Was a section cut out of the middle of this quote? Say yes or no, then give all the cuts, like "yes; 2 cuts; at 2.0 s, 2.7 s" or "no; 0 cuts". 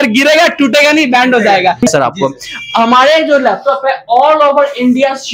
yes; 1 cut; at 1.8 s